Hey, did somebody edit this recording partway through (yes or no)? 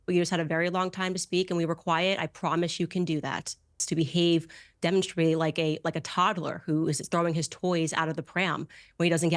yes